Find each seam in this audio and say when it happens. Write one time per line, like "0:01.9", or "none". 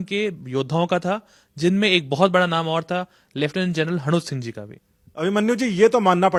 none